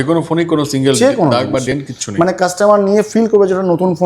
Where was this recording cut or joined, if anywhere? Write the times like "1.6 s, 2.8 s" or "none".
none